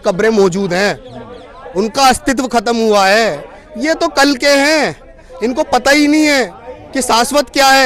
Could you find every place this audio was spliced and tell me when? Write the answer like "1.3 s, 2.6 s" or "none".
none